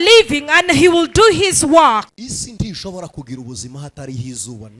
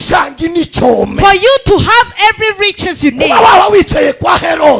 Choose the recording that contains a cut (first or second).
first